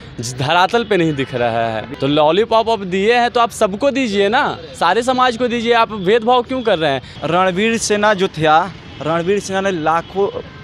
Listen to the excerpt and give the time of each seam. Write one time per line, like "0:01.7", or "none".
0:01.9
0:07.1